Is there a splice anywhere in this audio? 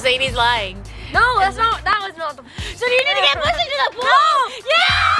no; 0 cuts

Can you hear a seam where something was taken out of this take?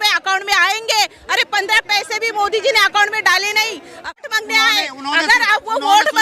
yes; 1 cut; at 4.0 s

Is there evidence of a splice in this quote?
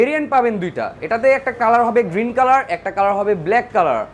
no; 0 cuts

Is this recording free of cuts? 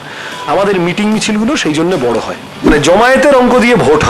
no; 1 cut; at 2.7 s

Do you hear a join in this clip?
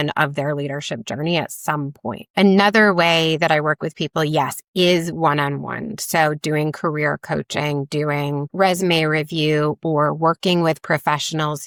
no; 0 cuts

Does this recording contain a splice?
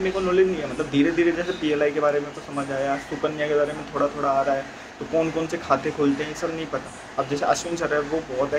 no; 0 cuts

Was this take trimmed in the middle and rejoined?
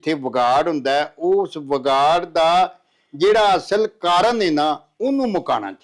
no; 0 cuts

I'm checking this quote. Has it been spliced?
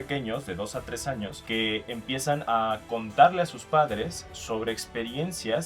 yes; 2 cuts; at 1.4 s, 2.4 s

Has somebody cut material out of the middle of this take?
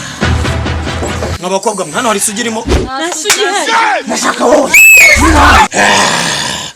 yes; 1 cut; at 5.7 s

